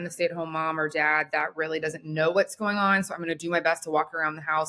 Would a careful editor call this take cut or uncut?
uncut